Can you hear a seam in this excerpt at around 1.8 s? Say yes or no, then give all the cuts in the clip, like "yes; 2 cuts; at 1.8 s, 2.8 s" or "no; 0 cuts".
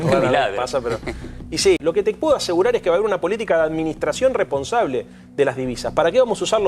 yes; 1 cut; at 1.8 s